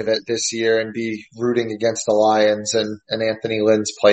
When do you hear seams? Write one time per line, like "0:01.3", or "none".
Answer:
none